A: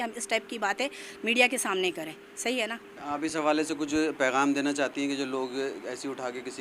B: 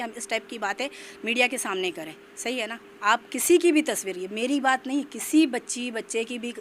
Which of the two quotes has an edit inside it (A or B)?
B